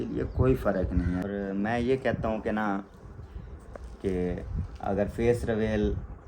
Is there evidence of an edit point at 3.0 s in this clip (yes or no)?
no